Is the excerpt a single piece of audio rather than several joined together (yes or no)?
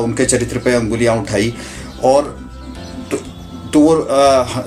yes